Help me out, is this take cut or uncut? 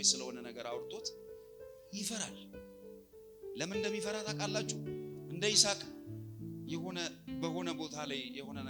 uncut